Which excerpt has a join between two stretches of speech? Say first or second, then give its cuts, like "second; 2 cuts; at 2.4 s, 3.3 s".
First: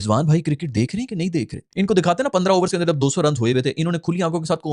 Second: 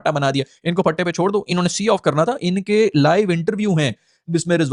first; 1 cut; at 1.6 s